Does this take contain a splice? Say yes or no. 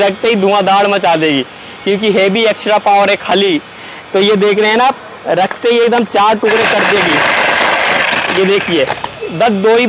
no